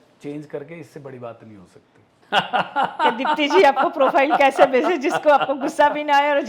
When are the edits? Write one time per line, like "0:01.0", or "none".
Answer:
0:02.1